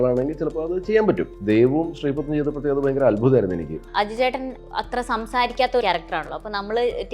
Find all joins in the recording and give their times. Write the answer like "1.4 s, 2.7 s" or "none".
1.3 s, 3.8 s, 4.6 s, 5.8 s